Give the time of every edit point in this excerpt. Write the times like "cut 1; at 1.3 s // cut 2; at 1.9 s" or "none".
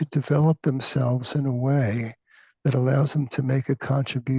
none